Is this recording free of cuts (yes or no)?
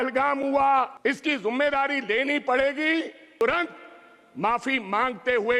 no